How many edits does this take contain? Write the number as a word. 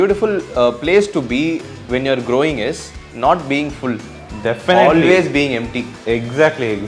zero